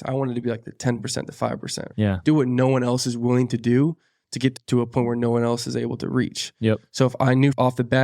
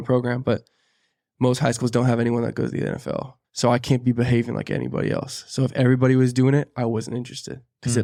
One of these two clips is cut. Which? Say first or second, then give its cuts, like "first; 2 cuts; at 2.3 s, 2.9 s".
first; 2 cuts; at 1.9 s, 4.5 s